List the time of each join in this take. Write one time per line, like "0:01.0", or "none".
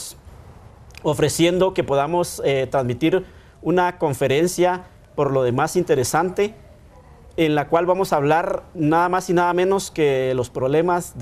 0:08.1